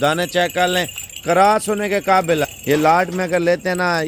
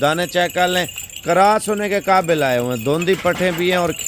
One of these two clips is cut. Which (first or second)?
first